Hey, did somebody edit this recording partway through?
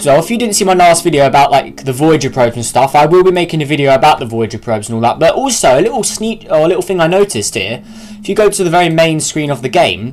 yes; 1 cut; at 5.3 s

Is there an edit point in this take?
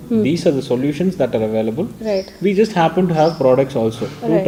no; 0 cuts

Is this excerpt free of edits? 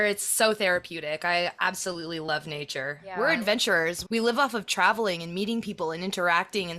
no; 2 cuts; at 3.0 s, 4.0 s

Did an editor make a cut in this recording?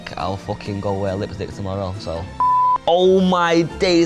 yes; 1 cut; at 2.4 s

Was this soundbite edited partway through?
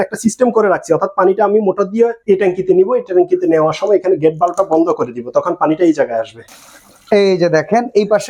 yes; 2 cuts; at 2.2 s, 6.4 s

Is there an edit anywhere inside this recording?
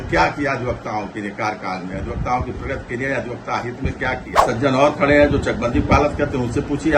yes; 1 cut; at 4.4 s

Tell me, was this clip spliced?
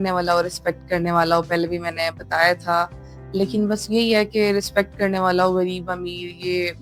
no; 0 cuts

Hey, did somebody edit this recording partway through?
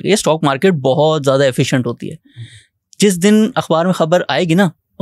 no; 0 cuts

